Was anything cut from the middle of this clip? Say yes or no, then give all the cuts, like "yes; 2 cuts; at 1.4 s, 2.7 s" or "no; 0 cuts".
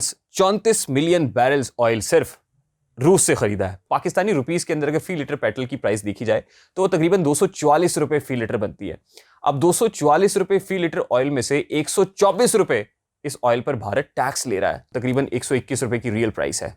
yes; 2 cuts; at 3.8 s, 14.8 s